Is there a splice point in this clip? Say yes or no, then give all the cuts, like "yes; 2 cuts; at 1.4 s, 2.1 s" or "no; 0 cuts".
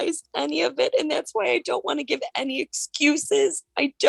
no; 0 cuts